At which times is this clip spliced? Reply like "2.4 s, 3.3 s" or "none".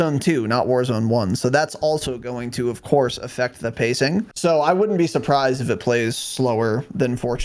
4.3 s